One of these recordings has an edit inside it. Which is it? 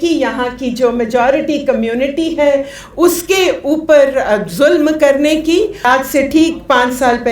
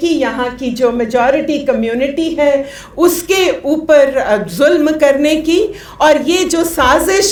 first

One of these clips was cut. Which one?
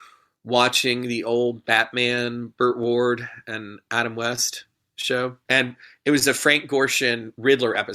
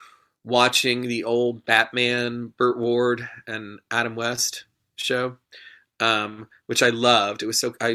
first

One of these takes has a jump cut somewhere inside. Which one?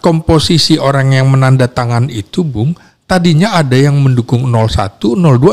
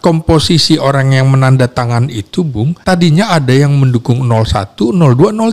second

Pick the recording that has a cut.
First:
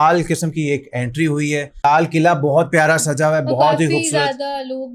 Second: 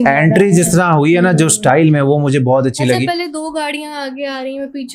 first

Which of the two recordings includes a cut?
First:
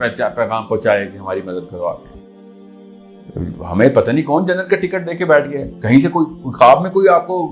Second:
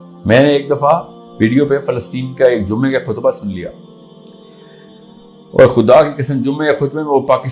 first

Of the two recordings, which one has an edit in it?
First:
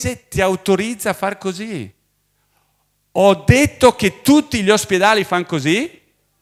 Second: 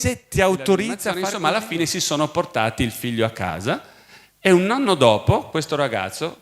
second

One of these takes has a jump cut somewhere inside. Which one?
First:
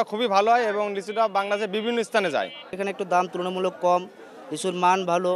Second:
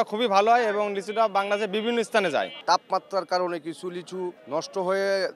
second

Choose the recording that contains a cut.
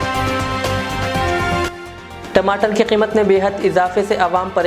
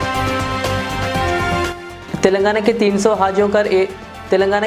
first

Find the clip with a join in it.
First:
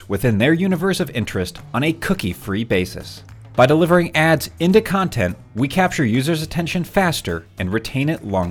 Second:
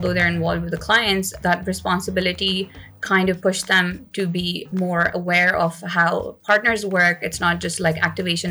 second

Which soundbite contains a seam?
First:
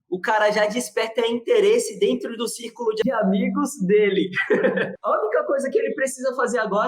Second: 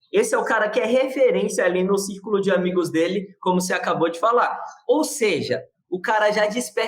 first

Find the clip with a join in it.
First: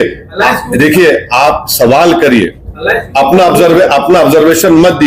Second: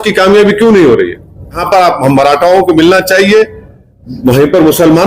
second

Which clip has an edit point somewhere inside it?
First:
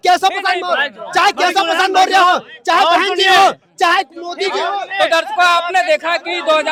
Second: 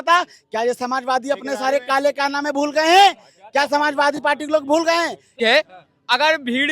second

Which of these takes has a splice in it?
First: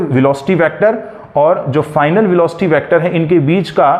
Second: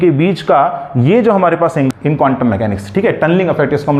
second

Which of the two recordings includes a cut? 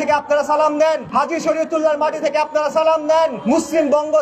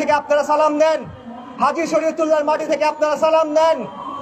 first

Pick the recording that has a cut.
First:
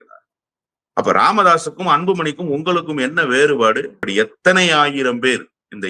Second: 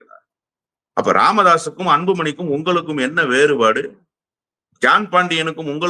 first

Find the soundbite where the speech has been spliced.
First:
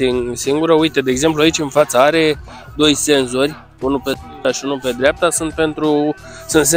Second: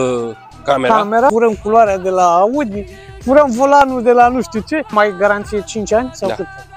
second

